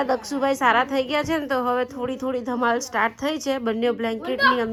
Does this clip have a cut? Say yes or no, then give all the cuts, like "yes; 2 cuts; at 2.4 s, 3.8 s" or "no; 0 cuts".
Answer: no; 0 cuts